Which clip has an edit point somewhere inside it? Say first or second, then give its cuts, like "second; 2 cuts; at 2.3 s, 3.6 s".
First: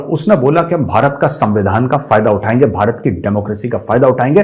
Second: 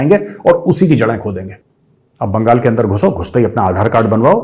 second; 1 cut; at 1.5 s